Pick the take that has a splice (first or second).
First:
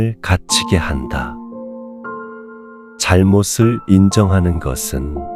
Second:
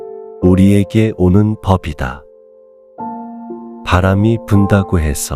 first